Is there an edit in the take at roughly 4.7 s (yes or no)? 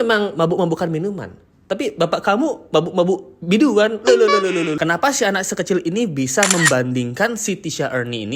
yes